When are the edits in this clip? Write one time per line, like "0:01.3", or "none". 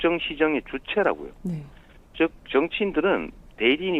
0:02.7